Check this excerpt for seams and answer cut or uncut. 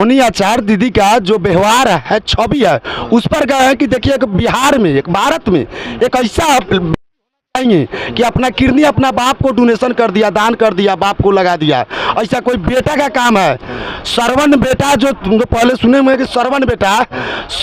uncut